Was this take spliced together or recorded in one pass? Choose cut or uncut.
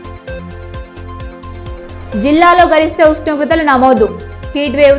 cut